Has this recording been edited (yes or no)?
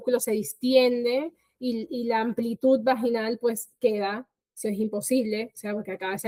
no